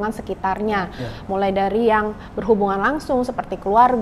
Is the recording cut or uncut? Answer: uncut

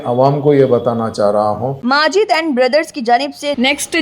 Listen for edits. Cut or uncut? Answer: cut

